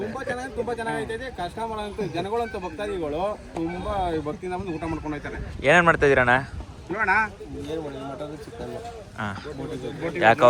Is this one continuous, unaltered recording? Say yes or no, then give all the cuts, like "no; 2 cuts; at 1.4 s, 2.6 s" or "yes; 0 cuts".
yes; 0 cuts